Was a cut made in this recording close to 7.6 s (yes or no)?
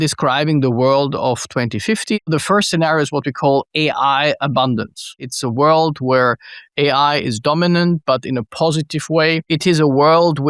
no